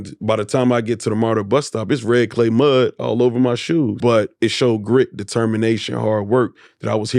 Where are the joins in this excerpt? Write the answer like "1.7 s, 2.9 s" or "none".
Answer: 3.9 s

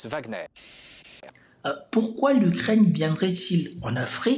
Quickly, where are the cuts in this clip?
1.0 s

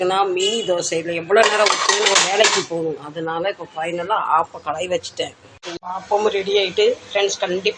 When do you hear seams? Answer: 5.8 s

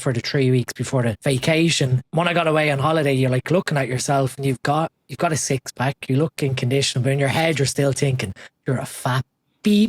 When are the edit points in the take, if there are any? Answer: 1.2 s, 2.0 s

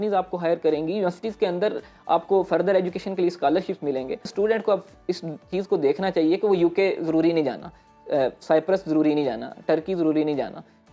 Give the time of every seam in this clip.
4.3 s

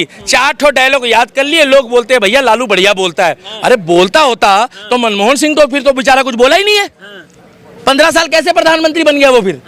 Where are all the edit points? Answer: none

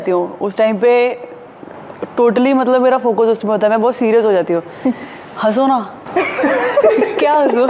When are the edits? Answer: none

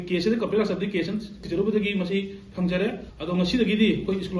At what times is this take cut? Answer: 1.4 s

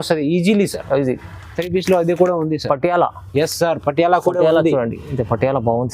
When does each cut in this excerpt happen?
1.6 s

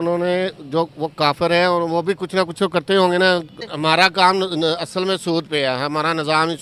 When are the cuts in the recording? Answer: 3.7 s

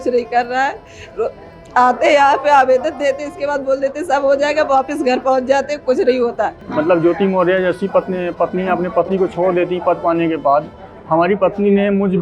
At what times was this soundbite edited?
6.6 s

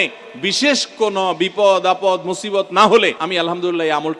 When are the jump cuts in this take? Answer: 3.2 s

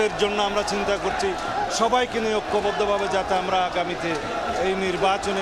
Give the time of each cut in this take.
none

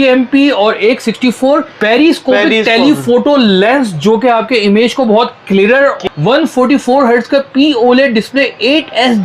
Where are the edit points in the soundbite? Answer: 1.7 s, 6.0 s

